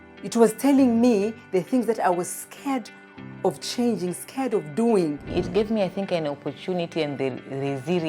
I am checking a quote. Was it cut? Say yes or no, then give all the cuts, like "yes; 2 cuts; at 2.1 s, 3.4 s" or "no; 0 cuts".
yes; 1 cut; at 5.2 s